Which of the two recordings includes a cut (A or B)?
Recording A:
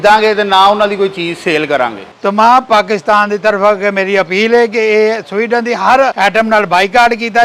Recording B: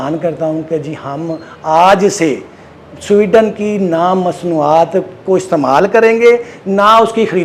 A